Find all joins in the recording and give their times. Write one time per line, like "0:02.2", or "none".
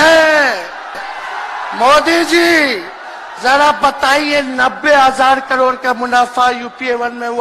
0:01.1